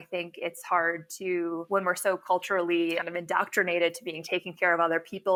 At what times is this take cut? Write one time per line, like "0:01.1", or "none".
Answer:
none